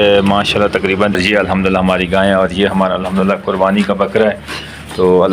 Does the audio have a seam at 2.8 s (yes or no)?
no